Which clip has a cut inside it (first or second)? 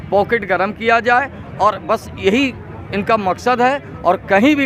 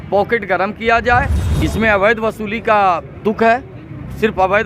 second